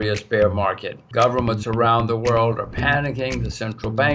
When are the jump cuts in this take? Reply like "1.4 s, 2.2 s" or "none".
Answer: 0.9 s